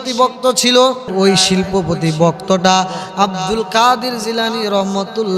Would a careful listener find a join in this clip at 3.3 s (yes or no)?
no